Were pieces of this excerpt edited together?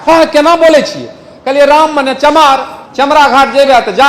yes; 1 cut; at 2.8 s

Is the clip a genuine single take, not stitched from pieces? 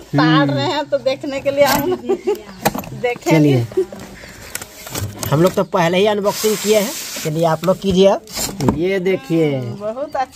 yes; 0 cuts

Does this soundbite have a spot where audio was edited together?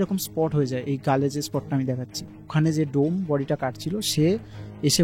yes; 1 cut; at 2.5 s

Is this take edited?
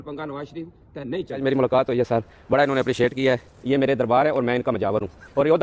yes; 2 cuts; at 1.4 s, 3.5 s

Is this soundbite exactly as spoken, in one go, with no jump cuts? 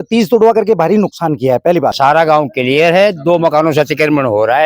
no; 1 cut; at 1.9 s

